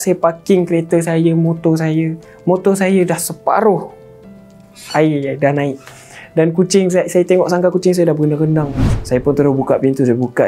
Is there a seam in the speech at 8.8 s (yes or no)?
yes